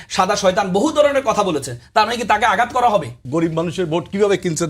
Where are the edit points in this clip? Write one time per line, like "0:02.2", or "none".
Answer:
0:03.2